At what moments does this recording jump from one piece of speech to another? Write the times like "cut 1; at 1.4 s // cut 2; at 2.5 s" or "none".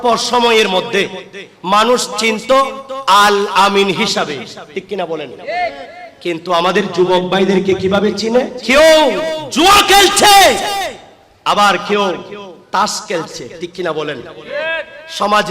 cut 1; at 8.6 s

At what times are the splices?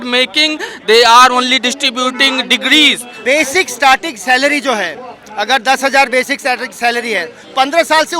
cut 1; at 3.1 s

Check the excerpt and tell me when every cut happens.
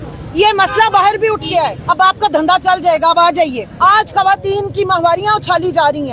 cut 1; at 1.8 s // cut 2; at 3.7 s

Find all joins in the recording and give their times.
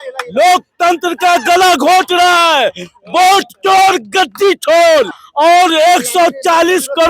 cut 1; at 5.2 s

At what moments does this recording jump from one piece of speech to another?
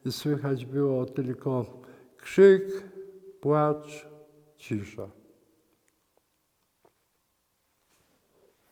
none

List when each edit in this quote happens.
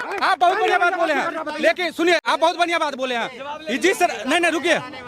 none

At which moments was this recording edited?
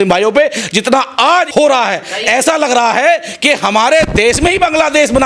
none

